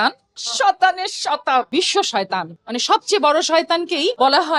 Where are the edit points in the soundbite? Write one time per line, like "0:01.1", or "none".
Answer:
0:01.7